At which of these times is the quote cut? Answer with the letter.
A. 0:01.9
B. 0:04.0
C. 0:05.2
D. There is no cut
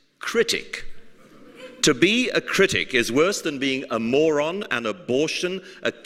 A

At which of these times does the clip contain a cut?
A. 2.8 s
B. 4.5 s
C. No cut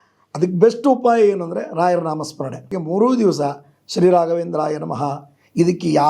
A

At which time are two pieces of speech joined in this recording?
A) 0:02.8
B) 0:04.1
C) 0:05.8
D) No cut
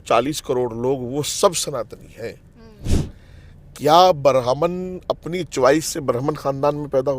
A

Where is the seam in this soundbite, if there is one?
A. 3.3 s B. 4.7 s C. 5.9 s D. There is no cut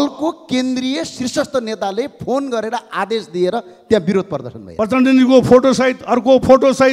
B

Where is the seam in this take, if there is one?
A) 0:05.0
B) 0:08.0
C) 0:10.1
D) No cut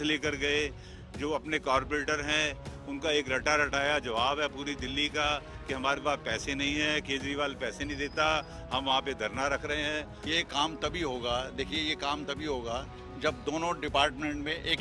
C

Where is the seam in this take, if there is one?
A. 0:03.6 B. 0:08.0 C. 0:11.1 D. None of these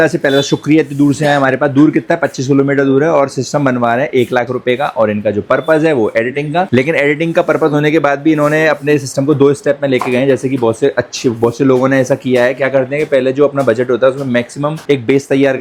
D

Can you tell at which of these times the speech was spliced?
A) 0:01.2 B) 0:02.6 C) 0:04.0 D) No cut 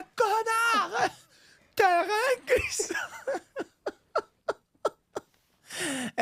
D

